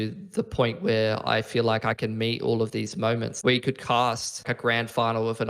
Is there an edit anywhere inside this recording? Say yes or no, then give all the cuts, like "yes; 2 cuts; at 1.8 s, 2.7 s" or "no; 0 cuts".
yes; 2 cuts; at 3.3 s, 4.5 s